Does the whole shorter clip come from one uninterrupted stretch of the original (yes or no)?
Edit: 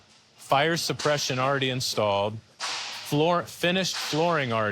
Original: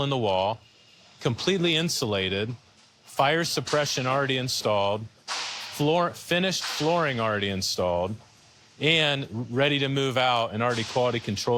yes